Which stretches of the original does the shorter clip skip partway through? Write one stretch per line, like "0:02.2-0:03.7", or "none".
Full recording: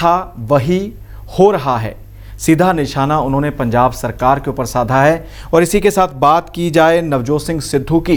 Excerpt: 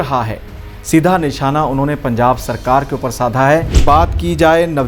0:05.3-0:06.1